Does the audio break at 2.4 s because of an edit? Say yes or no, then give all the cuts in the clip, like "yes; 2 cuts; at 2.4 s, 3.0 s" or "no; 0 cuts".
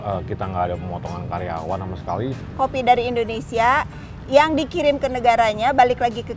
yes; 1 cut; at 2.4 s